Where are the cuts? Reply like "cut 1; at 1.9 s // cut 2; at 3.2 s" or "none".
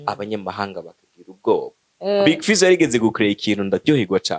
cut 1; at 1.8 s

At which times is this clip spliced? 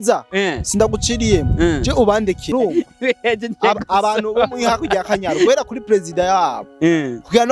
cut 1; at 2.5 s

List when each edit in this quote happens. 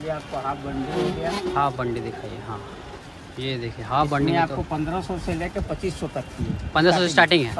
none

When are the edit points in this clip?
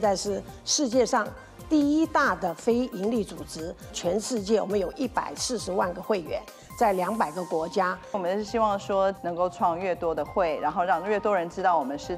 cut 1; at 3.9 s // cut 2; at 8.2 s

